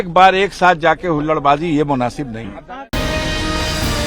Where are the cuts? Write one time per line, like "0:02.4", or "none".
none